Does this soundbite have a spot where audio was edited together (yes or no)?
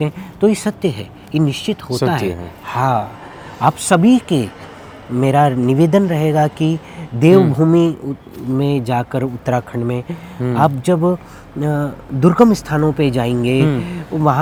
no